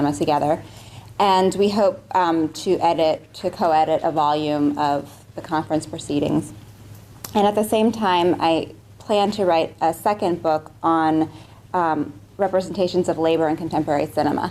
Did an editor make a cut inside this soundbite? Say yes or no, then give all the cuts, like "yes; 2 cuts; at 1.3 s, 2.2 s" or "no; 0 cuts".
yes; 1 cut; at 1.0 s